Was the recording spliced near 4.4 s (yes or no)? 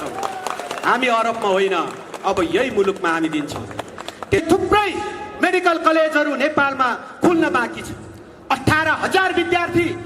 yes